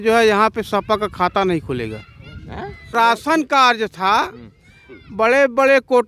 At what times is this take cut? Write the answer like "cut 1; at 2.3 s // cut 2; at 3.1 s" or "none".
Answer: cut 1; at 2.9 s